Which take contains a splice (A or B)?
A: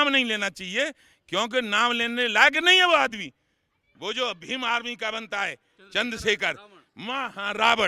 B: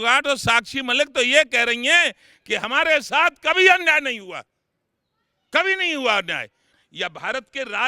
B